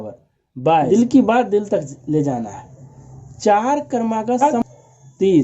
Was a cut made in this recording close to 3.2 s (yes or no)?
no